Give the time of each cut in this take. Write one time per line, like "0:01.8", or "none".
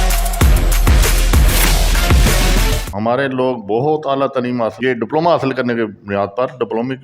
0:02.8